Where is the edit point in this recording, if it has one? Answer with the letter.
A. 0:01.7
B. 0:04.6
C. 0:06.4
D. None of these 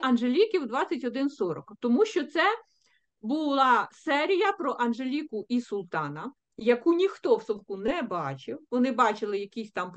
D